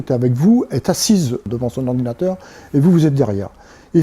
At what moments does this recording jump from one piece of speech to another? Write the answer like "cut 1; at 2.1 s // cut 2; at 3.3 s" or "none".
cut 1; at 1.4 s